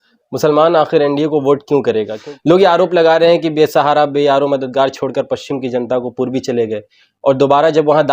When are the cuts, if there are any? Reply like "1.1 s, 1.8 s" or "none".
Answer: 2.1 s